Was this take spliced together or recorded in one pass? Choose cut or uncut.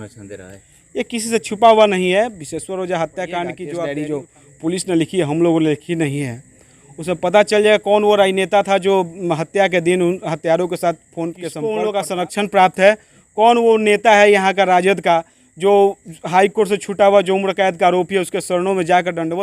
cut